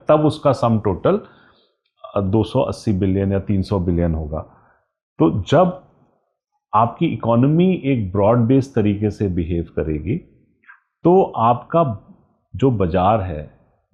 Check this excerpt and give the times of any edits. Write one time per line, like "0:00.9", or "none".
none